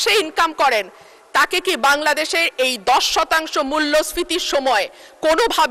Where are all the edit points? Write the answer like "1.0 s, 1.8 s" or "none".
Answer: none